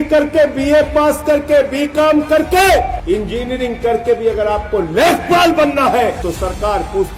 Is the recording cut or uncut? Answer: cut